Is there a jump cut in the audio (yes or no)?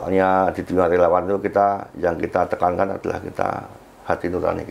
no